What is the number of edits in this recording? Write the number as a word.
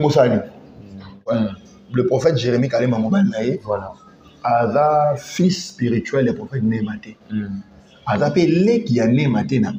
one